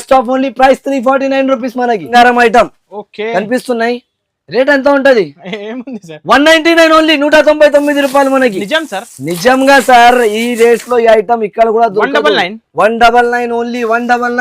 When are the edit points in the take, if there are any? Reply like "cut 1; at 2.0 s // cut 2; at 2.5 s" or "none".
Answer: cut 1; at 2.1 s

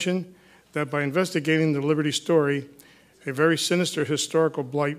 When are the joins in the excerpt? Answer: cut 1; at 3.5 s

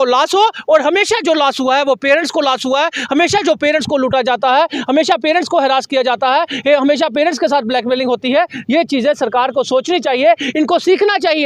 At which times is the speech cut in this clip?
none

